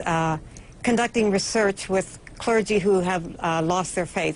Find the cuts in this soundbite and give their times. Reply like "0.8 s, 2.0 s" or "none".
none